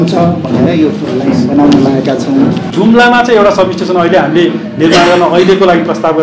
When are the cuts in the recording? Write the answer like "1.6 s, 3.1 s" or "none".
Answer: 2.7 s

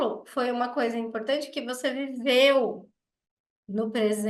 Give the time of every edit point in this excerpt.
none

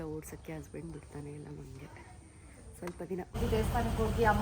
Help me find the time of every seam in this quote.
3.4 s

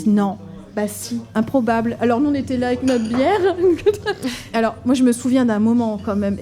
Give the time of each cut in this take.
1.2 s, 4.4 s

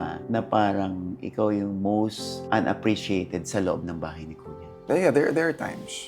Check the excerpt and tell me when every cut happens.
4.7 s

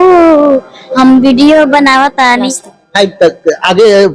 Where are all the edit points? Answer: 2.3 s

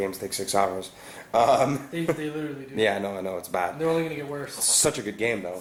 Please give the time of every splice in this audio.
none

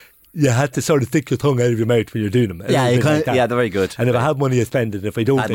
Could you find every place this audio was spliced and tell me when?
none

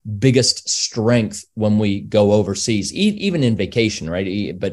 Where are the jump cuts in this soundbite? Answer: none

